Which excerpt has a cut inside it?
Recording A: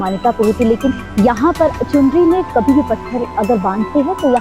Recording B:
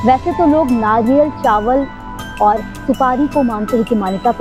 A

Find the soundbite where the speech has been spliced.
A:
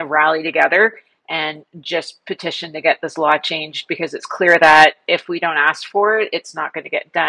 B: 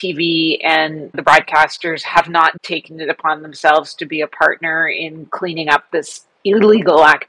B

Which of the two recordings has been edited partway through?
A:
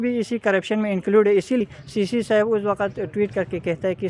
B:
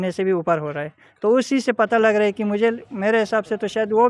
A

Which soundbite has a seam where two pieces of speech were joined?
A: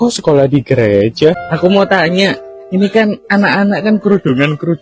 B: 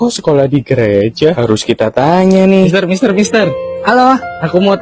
A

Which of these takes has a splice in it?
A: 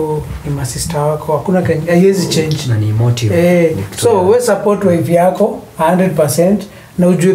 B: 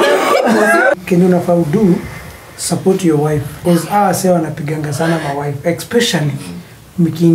B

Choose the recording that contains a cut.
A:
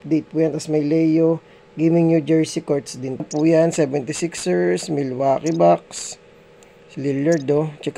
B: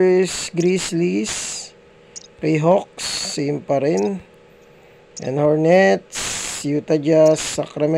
A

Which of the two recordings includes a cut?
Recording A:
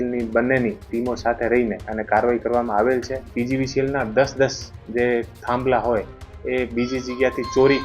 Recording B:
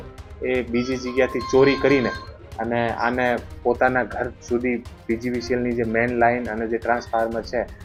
A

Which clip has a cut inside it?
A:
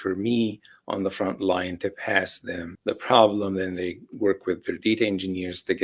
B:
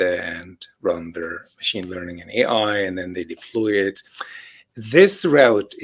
A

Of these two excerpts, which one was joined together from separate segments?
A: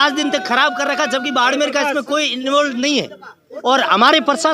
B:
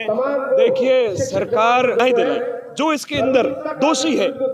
B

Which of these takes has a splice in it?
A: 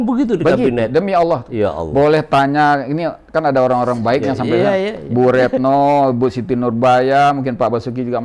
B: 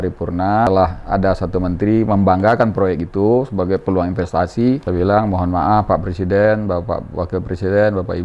B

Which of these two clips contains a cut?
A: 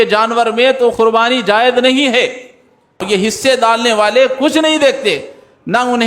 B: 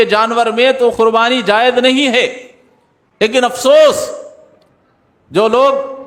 A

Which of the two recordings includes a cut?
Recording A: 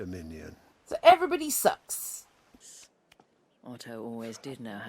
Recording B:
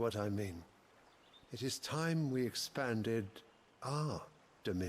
A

